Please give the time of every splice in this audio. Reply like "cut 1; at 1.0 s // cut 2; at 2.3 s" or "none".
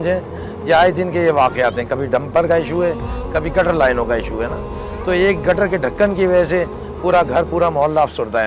none

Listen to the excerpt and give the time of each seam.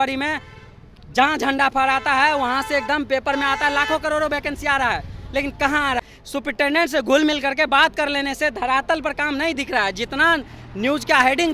cut 1; at 6.0 s

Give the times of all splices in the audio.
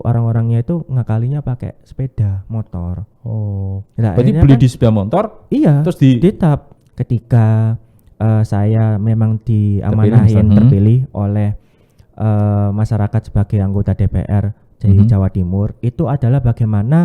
cut 1; at 6.7 s

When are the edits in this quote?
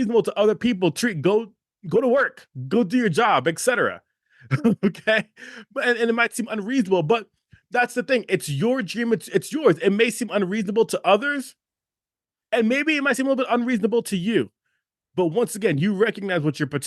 none

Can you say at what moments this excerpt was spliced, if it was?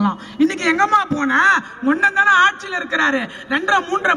none

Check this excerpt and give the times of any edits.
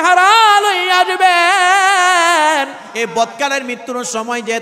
cut 1; at 2.9 s

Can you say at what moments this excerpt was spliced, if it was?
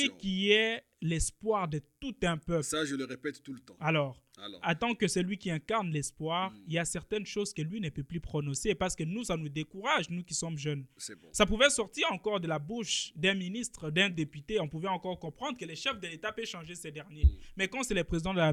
none

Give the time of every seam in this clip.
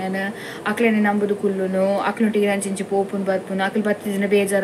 none

